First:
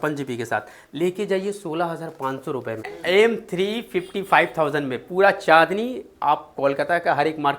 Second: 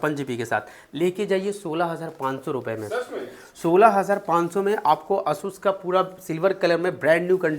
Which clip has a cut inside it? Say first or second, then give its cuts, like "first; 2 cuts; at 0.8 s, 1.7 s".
first; 1 cut; at 2.9 s